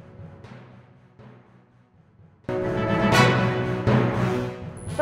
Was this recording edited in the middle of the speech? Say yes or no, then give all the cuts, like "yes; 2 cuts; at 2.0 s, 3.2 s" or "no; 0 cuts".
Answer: yes; 1 cut; at 1.3 s